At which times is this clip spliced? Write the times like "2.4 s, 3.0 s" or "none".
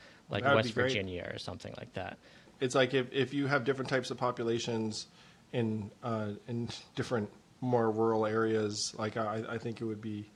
none